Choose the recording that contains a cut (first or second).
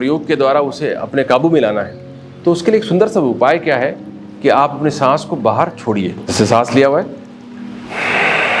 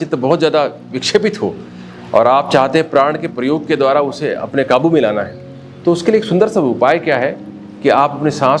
first